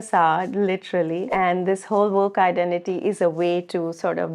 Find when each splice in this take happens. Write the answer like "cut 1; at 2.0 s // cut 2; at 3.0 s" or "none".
cut 1; at 1.3 s